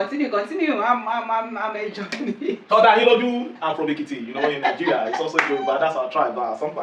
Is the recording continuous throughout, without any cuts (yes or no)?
yes